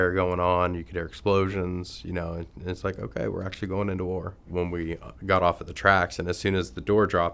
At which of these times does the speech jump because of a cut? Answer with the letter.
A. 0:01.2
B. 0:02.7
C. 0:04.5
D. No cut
C